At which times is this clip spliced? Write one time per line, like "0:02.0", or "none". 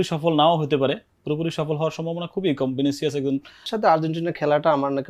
0:03.7